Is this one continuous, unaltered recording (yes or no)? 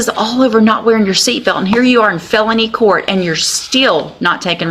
yes